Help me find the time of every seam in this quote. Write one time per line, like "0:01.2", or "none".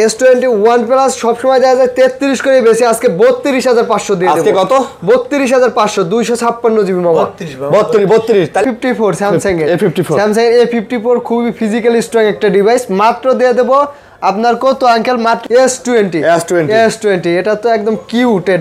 0:08.6
0:15.4

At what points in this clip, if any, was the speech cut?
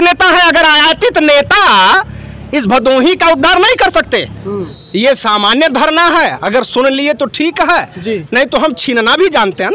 0:04.7

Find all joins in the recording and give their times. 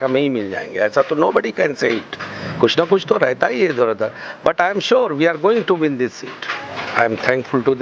0:06.7

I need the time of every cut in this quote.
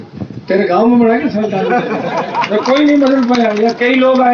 none

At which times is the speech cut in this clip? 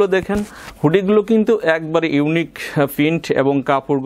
none

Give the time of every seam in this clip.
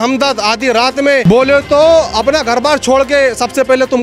0:01.2

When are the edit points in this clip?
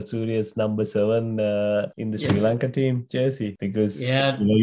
0:02.0
0:03.6

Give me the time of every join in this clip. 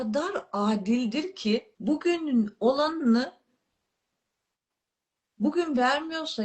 0:01.7

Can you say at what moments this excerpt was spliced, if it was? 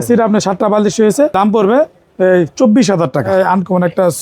0:01.3
0:03.3

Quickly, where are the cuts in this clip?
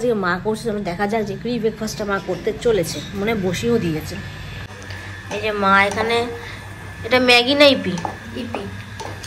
none

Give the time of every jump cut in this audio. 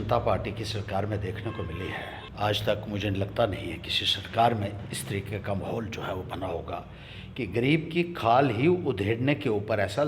0:02.2

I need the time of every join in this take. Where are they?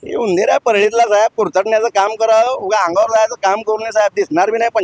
none

